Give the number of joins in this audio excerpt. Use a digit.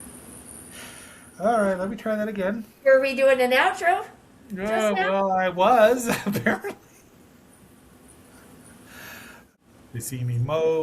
1